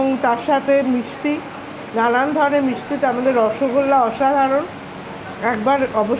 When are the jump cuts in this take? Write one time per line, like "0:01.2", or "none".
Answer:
none